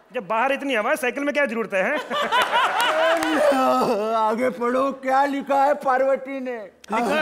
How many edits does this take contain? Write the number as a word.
one